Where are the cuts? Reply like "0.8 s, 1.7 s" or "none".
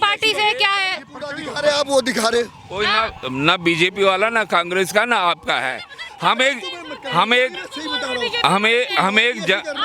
none